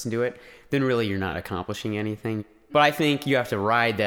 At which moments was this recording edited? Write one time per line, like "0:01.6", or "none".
0:02.7